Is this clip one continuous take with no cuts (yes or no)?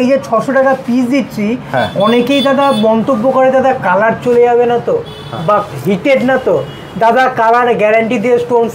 no